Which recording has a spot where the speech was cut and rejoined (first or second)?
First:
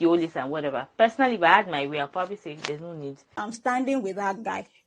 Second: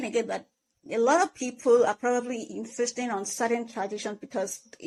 first